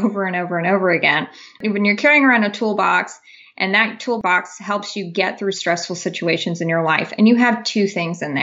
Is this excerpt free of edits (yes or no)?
no